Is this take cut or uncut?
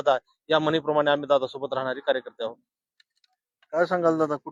uncut